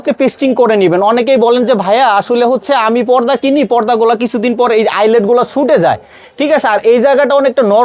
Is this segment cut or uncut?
uncut